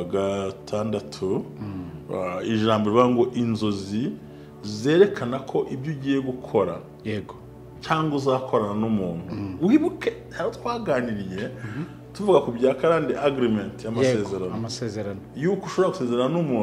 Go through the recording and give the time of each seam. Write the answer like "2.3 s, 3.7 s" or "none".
none